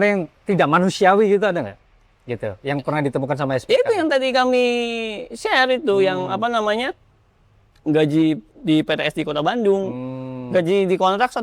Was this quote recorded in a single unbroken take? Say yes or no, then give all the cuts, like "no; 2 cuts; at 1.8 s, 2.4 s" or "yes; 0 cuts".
yes; 0 cuts